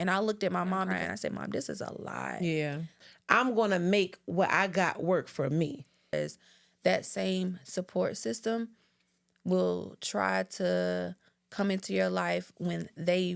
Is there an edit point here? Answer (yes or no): yes